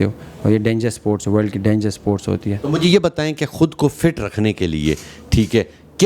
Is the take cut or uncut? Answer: uncut